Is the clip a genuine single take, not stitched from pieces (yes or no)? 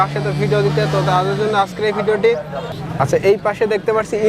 no